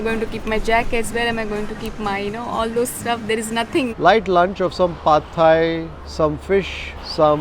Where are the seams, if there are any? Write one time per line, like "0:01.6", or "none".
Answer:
0:03.9